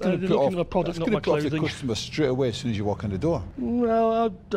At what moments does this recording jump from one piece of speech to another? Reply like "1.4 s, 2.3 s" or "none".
none